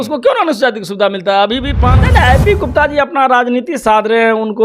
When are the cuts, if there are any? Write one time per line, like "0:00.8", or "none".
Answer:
0:02.0